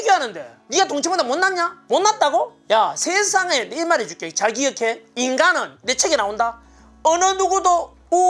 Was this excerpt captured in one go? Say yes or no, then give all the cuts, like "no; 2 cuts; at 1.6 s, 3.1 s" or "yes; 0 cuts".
yes; 0 cuts